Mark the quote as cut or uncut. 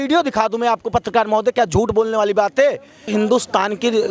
cut